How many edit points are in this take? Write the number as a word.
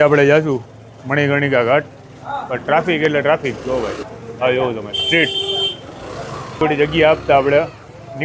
one